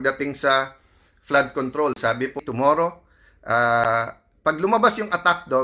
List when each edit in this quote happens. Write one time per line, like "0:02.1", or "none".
0:02.4